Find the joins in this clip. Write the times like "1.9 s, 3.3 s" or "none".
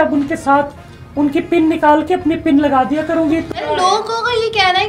3.7 s